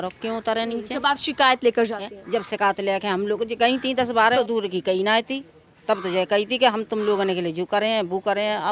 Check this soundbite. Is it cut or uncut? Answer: cut